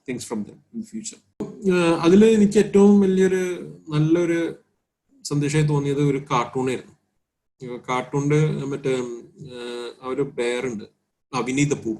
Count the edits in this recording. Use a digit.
1